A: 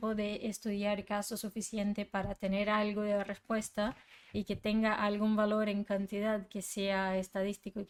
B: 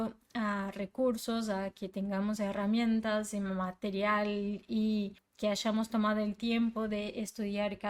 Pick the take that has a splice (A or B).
B